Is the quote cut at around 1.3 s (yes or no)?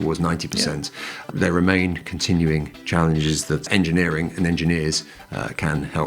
yes